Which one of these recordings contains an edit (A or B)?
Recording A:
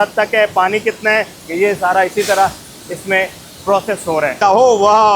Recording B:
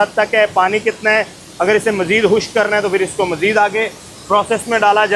A